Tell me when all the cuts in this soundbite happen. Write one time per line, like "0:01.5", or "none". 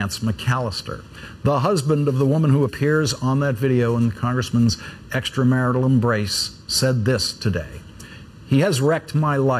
0:06.9